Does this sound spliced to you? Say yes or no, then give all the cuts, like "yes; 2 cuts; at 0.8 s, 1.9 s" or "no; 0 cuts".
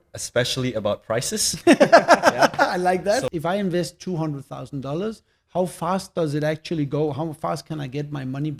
yes; 1 cut; at 3.2 s